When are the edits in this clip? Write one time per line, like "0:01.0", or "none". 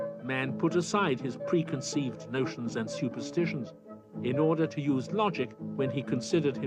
0:02.5